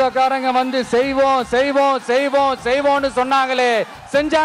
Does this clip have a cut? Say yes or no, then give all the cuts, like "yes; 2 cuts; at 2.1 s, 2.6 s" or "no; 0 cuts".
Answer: no; 0 cuts